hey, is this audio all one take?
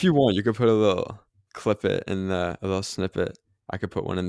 yes; 0 cuts

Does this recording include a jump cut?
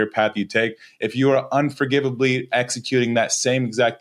no; 0 cuts

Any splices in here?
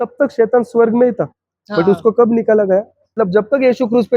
yes; 1 cut; at 3.1 s

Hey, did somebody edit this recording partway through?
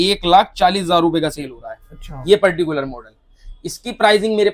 no; 0 cuts

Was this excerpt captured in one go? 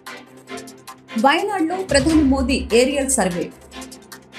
no; 1 cut; at 1.1 s

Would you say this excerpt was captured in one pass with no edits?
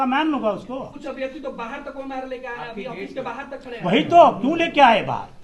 no; 1 cut; at 0.9 s

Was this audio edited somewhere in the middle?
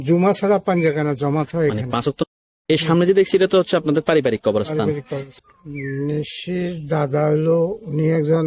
yes; 2 cuts; at 2.2 s, 5.3 s

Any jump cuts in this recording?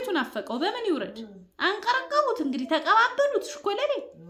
no; 0 cuts

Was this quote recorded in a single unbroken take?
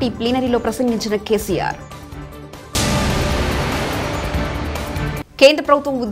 yes; 0 cuts

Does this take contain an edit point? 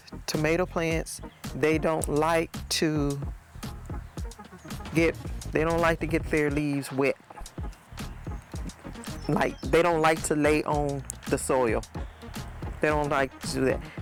no; 0 cuts

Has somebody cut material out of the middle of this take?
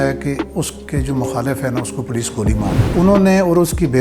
yes; 1 cut; at 2.9 s

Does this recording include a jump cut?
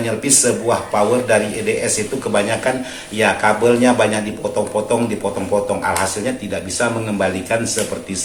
no; 0 cuts

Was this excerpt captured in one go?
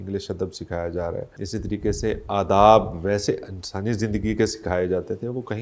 no; 1 cut; at 1.4 s

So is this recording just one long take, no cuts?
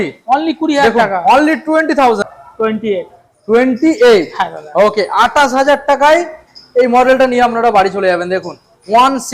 no; 1 cut; at 2.3 s

